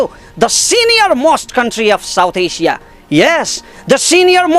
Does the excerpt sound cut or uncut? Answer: uncut